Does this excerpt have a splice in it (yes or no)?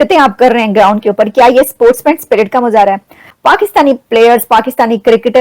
yes